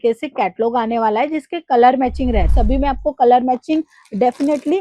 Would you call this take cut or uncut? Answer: cut